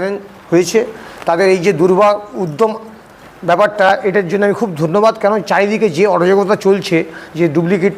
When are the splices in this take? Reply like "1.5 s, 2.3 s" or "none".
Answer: none